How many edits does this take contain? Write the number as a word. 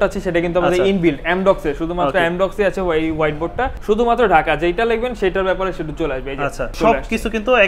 two